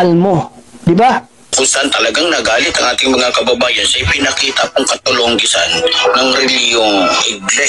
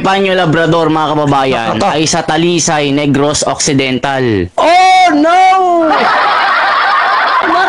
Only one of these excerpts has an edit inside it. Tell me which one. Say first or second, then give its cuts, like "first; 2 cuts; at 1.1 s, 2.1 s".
first; 1 cut; at 1.5 s